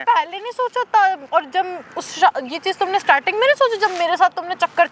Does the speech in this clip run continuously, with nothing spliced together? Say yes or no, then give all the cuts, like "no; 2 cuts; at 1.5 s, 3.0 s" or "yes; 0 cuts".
yes; 0 cuts